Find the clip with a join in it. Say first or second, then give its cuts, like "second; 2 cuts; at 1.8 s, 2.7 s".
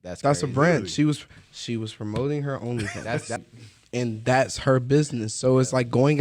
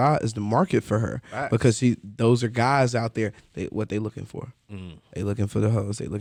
first; 1 cut; at 3.4 s